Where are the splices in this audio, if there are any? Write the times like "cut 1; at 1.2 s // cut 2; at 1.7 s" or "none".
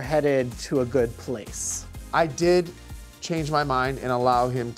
cut 1; at 1.9 s